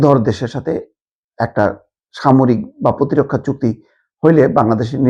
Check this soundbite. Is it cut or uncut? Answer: uncut